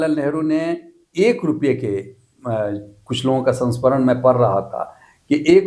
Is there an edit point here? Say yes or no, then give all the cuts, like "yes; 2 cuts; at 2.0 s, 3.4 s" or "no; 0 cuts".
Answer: no; 0 cuts